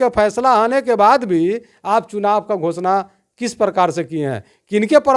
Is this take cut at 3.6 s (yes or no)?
no